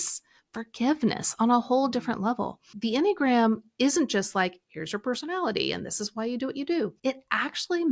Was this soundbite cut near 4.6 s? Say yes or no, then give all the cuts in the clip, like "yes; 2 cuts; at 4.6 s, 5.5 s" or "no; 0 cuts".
no; 2 cuts; at 2.7 s, 7.0 s